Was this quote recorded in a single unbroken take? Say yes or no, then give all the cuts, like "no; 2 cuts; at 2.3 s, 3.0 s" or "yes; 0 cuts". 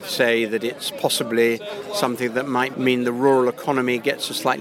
no; 1 cut; at 2.7 s